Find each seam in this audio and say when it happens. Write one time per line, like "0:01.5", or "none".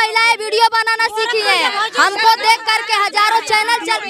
none